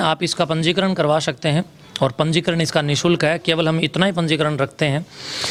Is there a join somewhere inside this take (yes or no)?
no